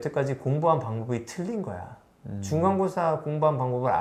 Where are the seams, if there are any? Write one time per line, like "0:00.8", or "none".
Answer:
none